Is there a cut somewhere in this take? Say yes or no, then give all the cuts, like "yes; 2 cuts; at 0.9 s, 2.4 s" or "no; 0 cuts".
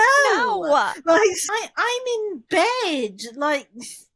yes; 1 cut; at 1.5 s